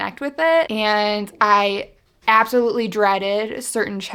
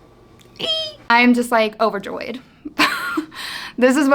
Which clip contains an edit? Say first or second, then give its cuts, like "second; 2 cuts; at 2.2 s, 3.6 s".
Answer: second; 1 cut; at 1.0 s